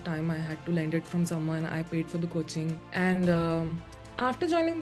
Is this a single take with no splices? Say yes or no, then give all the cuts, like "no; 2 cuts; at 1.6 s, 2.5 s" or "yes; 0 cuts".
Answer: yes; 0 cuts